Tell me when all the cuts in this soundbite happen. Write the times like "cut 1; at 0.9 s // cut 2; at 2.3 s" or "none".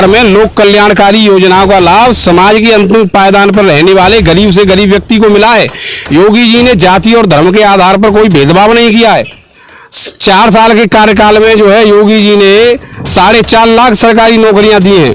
none